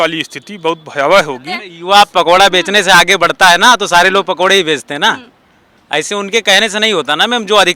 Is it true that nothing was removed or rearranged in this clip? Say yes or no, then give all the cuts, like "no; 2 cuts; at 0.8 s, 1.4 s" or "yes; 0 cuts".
no; 1 cut; at 1.7 s